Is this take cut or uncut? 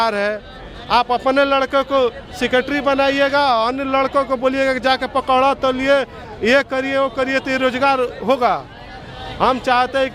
uncut